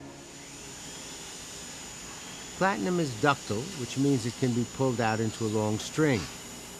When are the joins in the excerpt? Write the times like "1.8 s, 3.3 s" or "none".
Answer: none

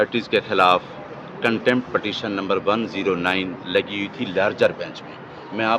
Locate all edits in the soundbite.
none

